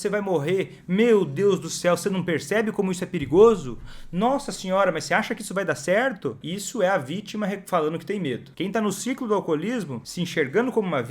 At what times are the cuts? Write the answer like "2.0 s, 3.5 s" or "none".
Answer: 6.4 s, 8.5 s, 10.0 s